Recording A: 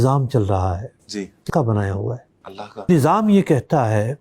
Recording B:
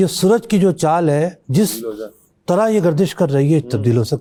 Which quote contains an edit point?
A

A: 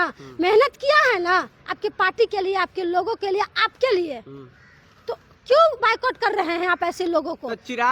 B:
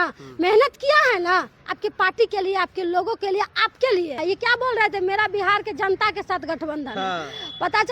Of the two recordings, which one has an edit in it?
B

